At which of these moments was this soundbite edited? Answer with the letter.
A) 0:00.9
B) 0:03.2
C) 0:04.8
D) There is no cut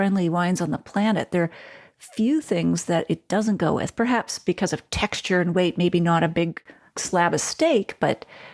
D